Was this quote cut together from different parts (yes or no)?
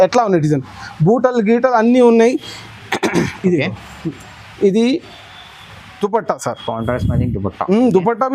no